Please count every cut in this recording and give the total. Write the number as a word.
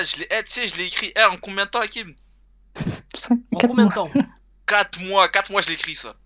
zero